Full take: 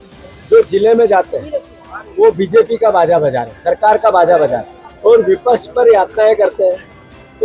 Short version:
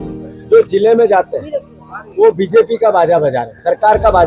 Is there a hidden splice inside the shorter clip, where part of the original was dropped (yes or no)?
no